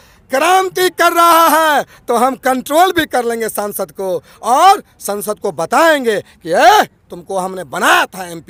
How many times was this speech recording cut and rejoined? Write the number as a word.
zero